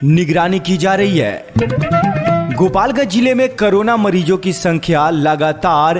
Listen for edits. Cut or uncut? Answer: uncut